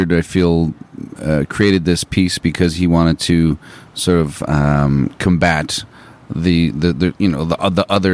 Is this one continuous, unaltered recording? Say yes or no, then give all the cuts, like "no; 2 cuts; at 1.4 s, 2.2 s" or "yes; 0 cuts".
yes; 0 cuts